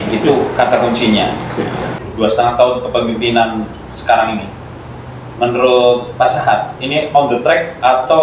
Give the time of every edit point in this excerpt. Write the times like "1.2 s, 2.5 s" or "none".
2.0 s